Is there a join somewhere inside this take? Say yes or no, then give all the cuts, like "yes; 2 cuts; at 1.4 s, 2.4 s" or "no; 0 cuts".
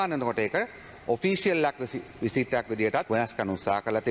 yes; 1 cut; at 3.1 s